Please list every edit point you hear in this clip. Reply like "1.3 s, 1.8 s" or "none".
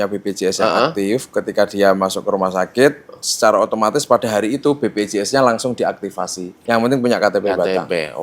6.5 s